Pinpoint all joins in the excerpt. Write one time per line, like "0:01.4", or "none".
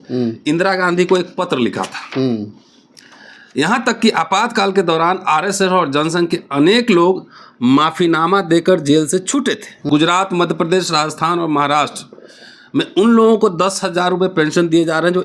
0:09.9